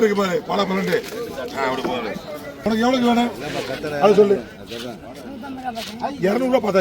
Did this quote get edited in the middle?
yes; 1 cut; at 2.6 s

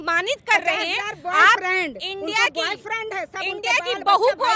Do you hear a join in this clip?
no; 0 cuts

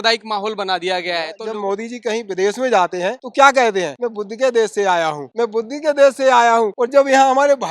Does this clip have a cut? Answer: yes; 5 cuts; at 1.4 s, 3.2 s, 4.0 s, 5.2 s, 6.8 s

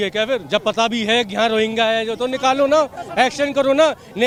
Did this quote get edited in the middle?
no; 0 cuts

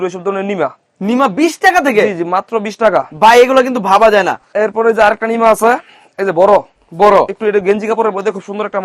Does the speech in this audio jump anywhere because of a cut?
no; 0 cuts

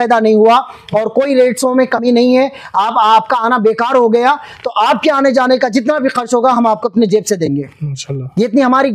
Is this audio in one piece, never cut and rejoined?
yes; 0 cuts

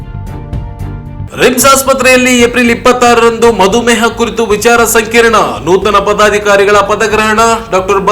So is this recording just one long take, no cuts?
no; 1 cut; at 1.2 s

